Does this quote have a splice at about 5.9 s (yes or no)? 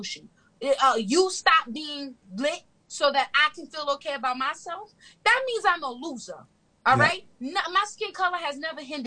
no